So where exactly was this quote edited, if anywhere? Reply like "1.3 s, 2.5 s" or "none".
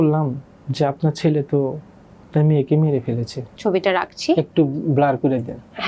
3.6 s